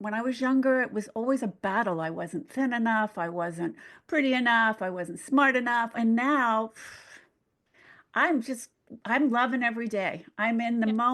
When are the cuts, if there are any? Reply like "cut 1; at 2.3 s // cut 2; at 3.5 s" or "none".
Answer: cut 1; at 5.9 s